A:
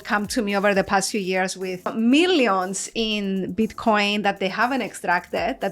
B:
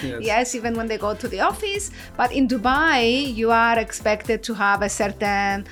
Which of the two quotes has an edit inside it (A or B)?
A